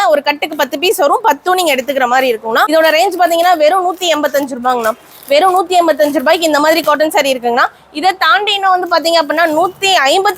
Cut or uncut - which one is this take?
cut